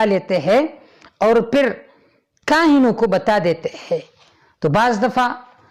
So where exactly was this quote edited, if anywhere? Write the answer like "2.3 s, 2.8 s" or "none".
none